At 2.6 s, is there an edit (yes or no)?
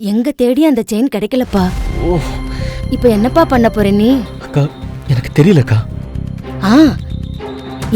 no